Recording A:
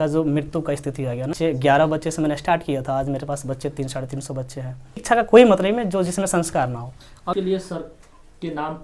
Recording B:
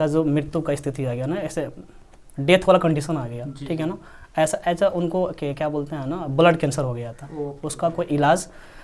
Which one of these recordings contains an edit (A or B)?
A